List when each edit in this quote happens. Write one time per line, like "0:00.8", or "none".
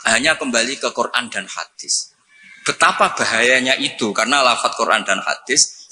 none